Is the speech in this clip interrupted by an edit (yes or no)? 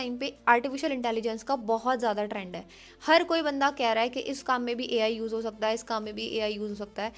no